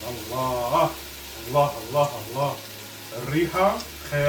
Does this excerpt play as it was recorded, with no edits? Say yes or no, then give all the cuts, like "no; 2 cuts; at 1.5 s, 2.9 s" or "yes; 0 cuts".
yes; 0 cuts